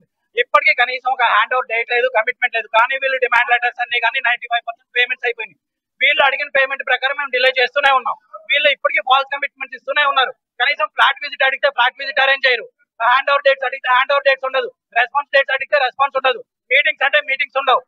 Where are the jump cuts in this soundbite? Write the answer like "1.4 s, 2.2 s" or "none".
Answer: none